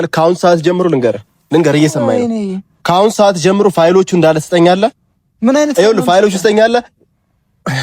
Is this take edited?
no; 0 cuts

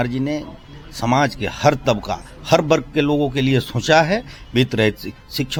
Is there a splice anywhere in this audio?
no; 0 cuts

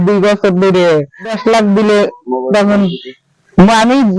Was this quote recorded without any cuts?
no; 1 cut; at 1.4 s

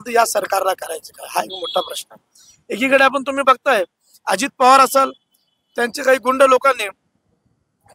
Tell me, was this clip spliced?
no; 0 cuts

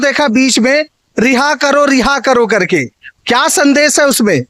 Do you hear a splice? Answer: no; 0 cuts

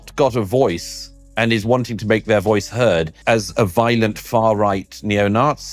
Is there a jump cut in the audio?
yes; 1 cut; at 3.2 s

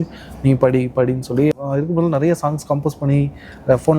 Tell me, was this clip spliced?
yes; 1 cut; at 1.5 s

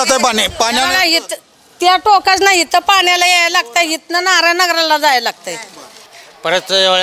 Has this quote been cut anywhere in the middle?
yes; 1 cut; at 6.1 s

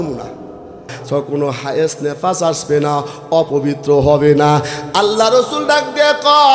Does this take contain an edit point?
yes; 1 cut; at 0.9 s

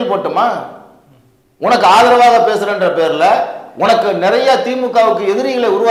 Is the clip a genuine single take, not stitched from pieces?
yes; 0 cuts

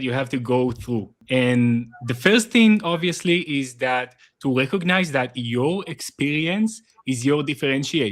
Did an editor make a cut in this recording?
yes; 1 cut; at 1.1 s

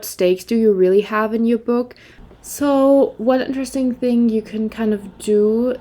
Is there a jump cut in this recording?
yes; 1 cut; at 2.2 s

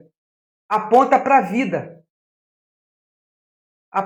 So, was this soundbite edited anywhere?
no; 0 cuts

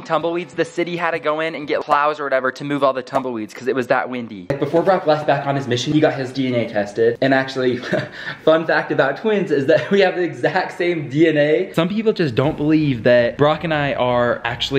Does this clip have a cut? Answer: yes; 3 cuts; at 4.5 s, 5.9 s, 11.7 s

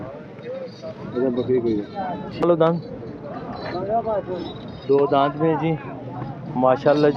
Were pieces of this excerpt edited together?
yes; 1 cut; at 2.4 s

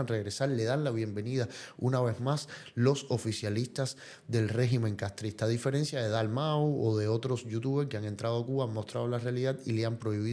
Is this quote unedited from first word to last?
yes; 0 cuts

